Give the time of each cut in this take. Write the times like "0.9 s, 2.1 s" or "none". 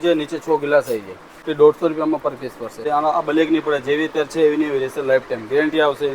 1.4 s, 2.8 s